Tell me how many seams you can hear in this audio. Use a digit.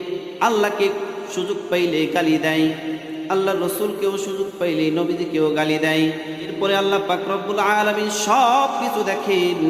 1